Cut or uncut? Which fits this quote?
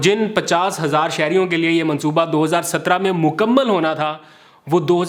uncut